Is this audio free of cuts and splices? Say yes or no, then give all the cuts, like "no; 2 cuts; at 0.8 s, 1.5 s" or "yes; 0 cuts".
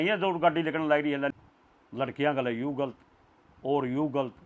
no; 1 cut; at 1.3 s